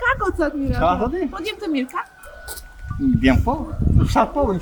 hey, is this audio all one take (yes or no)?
yes